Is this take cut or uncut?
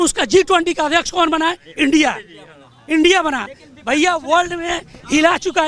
uncut